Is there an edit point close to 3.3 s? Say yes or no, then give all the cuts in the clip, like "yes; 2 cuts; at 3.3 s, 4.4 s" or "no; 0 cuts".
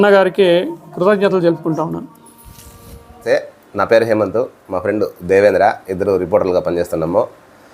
yes; 1 cut; at 3.3 s